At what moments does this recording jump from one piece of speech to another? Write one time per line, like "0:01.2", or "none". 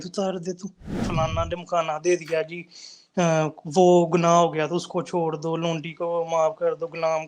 0:01.0